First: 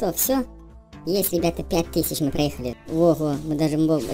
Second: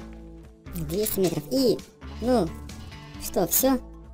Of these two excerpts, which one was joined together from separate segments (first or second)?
first